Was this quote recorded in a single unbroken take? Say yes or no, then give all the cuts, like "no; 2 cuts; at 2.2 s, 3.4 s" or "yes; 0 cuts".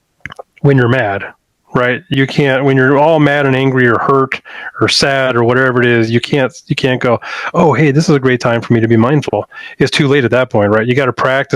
no; 1 cut; at 2.1 s